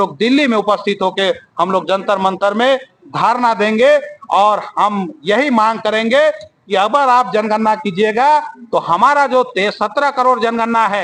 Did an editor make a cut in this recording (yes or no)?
no